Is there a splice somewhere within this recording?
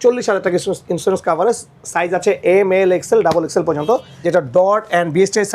yes; 1 cut; at 4.1 s

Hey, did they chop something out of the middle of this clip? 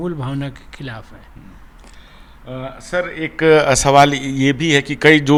no; 0 cuts

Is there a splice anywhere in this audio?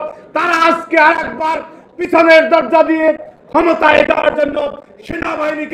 no; 0 cuts

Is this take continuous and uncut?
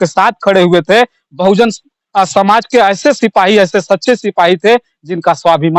yes; 0 cuts

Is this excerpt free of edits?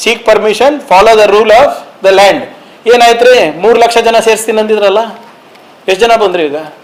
yes; 0 cuts

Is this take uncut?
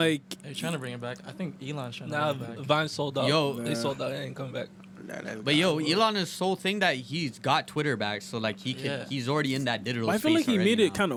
yes; 0 cuts

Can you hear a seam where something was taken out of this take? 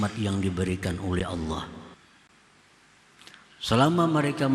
yes; 1 cut; at 1.9 s

